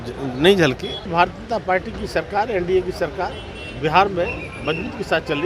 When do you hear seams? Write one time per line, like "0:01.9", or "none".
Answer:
0:01.0